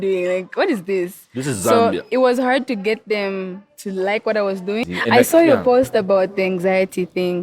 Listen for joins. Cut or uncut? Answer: cut